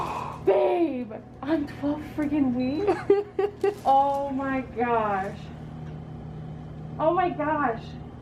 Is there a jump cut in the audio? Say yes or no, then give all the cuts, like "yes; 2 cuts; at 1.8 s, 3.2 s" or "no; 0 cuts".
no; 0 cuts